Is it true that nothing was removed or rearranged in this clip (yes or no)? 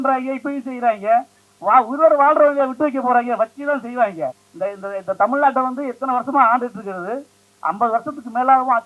no